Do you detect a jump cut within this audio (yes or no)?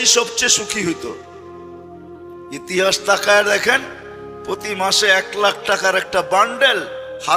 yes